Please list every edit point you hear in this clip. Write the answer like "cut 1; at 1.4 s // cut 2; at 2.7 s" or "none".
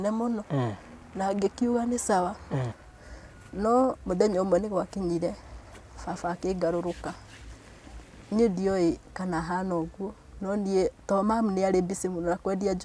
cut 1; at 2.7 s